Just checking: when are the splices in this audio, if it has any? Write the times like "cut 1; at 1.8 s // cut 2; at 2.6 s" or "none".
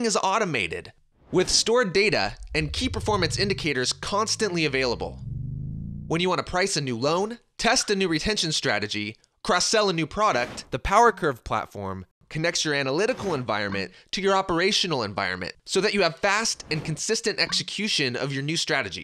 cut 1; at 12.4 s